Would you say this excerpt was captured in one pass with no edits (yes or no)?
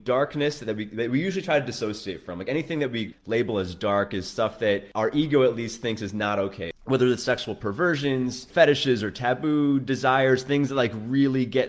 no